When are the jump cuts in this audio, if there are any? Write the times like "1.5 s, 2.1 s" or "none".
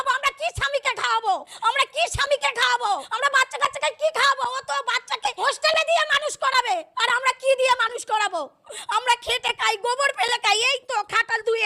1.5 s, 3.1 s, 5.4 s, 6.9 s